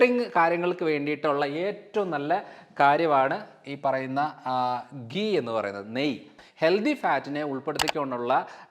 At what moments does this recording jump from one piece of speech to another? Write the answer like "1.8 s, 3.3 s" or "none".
6.4 s

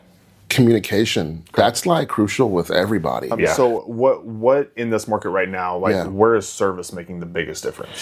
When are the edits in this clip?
3.5 s

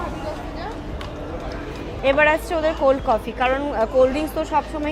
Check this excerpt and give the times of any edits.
1.9 s

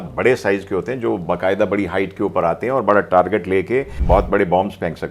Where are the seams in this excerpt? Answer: 3.9 s

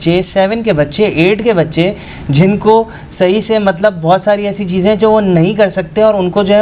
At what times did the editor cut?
none

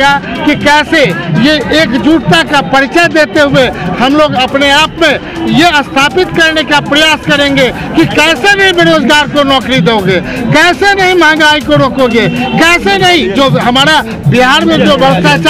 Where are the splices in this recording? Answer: none

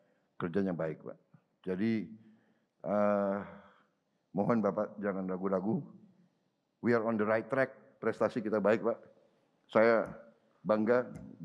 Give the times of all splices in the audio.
7.9 s

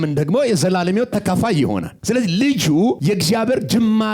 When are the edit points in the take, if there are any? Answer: 1.9 s, 3.0 s

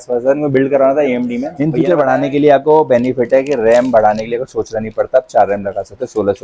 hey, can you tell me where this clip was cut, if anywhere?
1.5 s

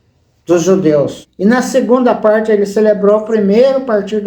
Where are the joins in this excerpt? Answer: 1.2 s

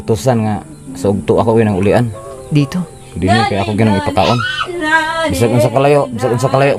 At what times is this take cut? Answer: none

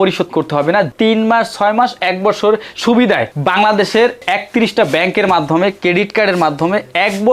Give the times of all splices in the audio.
0.9 s

